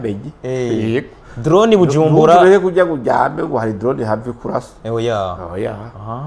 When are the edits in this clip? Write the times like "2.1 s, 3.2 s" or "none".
none